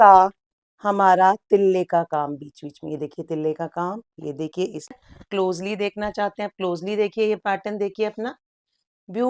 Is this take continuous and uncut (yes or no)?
no